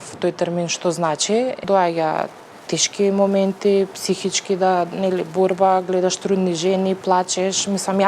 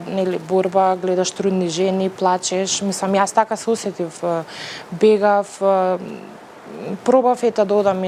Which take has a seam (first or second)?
first